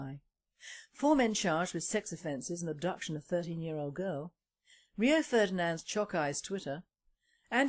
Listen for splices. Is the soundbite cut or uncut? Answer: cut